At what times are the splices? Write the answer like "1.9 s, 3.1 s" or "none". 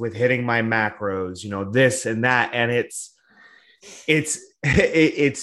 none